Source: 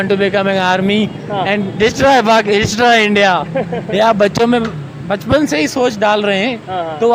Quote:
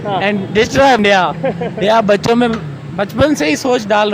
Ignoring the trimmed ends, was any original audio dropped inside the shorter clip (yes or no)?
yes